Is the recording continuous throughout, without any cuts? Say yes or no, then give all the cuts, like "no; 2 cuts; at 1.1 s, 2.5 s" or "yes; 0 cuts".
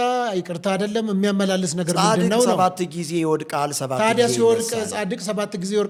yes; 0 cuts